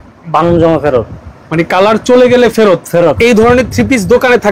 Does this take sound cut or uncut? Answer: cut